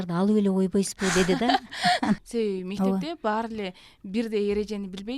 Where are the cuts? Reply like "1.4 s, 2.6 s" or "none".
2.2 s